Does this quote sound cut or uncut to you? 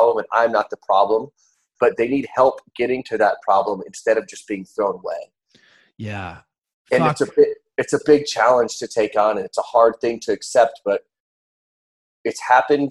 uncut